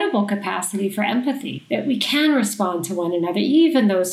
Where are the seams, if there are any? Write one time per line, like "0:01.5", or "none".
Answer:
0:01.6